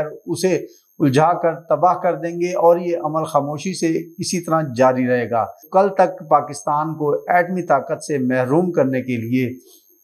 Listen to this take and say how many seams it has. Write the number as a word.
one